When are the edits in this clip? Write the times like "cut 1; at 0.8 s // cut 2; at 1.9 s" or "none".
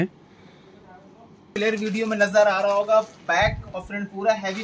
cut 1; at 1.5 s